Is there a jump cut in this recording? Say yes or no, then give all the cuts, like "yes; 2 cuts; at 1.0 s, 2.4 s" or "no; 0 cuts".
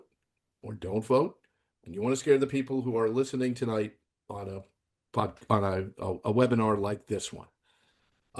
no; 0 cuts